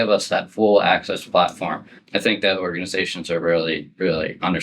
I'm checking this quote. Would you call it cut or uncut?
cut